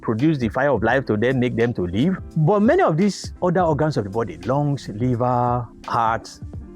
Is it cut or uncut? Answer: cut